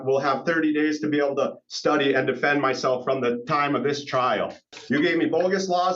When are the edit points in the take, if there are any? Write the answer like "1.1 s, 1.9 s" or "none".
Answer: 4.6 s